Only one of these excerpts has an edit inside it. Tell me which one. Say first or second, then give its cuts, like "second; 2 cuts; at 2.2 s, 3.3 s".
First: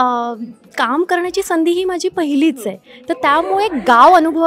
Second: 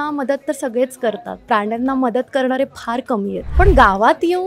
second; 1 cut; at 3.4 s